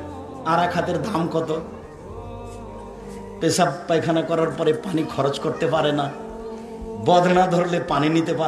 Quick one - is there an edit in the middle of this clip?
yes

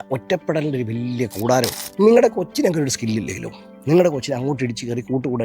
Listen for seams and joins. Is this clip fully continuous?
no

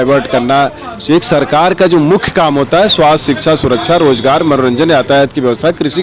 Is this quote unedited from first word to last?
yes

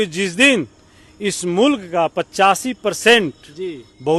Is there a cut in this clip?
no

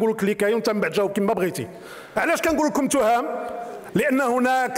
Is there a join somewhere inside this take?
yes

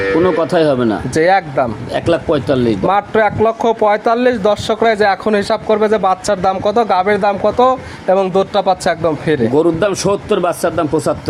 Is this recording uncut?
yes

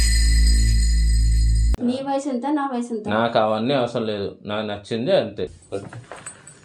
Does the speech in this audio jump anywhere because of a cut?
yes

